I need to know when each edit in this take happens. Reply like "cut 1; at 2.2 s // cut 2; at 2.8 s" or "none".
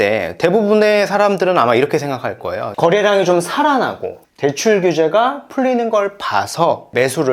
cut 1; at 2.7 s